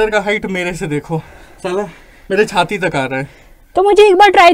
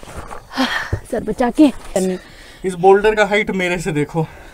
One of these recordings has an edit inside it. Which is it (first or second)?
second